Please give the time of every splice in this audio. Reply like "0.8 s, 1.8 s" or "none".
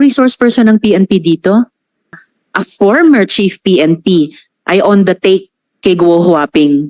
2.1 s